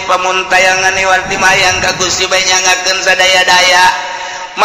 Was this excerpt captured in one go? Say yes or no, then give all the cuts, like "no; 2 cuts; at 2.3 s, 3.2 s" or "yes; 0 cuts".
no; 1 cut; at 1.3 s